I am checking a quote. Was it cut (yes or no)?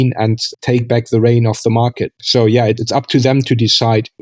yes